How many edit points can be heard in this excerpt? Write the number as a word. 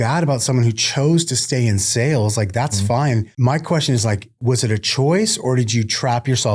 one